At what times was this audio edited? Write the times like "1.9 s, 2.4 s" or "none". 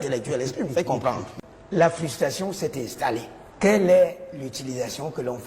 1.3 s, 3.4 s